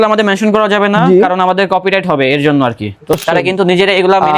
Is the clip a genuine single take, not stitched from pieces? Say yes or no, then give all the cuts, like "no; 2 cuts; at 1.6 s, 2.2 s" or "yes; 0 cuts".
no; 1 cut; at 3.1 s